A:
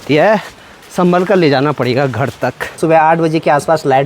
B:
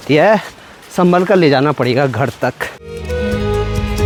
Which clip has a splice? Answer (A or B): A